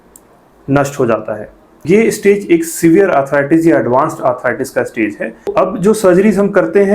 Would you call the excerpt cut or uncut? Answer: cut